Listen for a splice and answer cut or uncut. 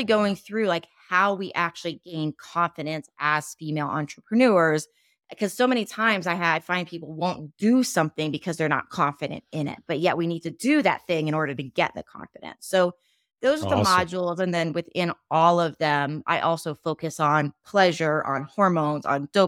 uncut